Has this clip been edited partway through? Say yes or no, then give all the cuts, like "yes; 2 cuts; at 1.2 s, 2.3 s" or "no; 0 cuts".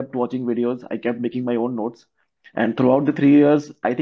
no; 0 cuts